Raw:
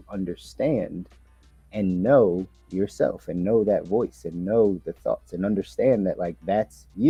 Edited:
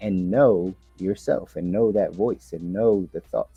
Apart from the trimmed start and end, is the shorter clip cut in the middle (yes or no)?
no